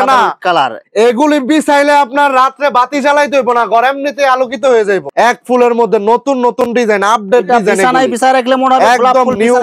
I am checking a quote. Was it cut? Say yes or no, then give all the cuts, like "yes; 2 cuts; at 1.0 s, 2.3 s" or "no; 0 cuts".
no; 0 cuts